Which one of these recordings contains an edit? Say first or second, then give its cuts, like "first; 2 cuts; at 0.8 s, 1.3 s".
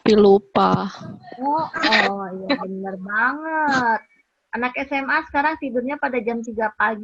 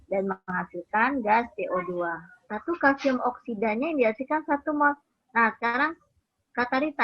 second; 1 cut; at 2.5 s